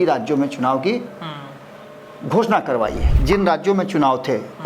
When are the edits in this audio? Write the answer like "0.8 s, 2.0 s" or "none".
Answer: 3.1 s